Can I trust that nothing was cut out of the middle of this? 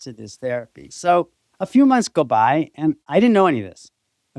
no; 1 cut; at 3.0 s

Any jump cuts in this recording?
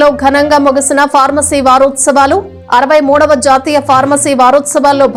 no; 0 cuts

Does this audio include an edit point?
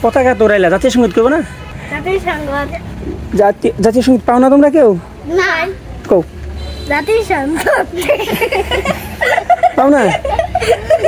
yes; 1 cut; at 1.8 s

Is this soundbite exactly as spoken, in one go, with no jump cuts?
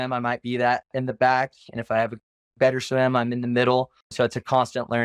no; 1 cut; at 4.0 s

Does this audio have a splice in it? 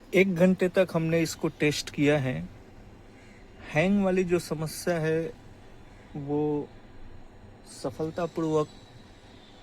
no; 0 cuts

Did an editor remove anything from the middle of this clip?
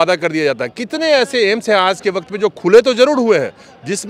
no; 0 cuts

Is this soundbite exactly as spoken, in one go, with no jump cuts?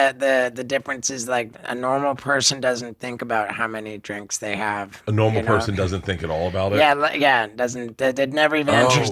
yes; 0 cuts

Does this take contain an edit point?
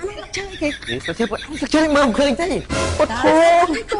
yes; 1 cut; at 2.7 s

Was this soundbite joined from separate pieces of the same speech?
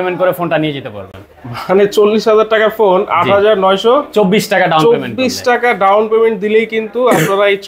no; 0 cuts

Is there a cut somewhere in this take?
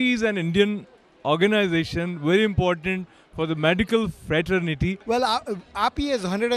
yes; 1 cut; at 5.0 s

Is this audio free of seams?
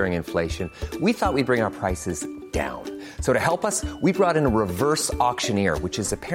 yes; 0 cuts

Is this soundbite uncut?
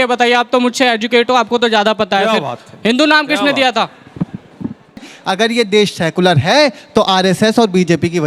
no; 1 cut; at 5.1 s

